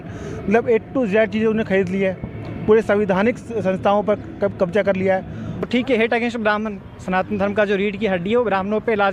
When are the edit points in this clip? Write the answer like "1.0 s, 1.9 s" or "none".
5.6 s